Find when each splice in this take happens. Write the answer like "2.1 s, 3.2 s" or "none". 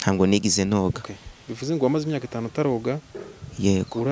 none